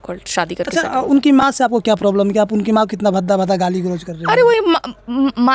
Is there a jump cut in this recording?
no; 0 cuts

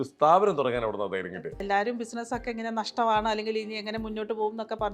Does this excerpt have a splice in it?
yes; 1 cut; at 1.6 s

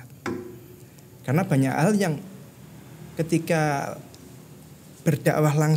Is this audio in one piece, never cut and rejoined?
yes; 0 cuts

